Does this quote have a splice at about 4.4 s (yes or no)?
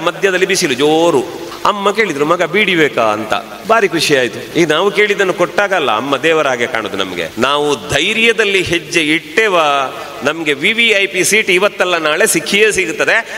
yes